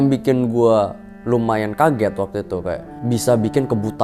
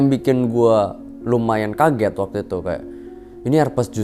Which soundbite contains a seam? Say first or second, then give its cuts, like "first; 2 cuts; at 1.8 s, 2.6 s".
first; 1 cut; at 2.9 s